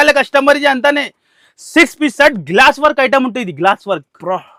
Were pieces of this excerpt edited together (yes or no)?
no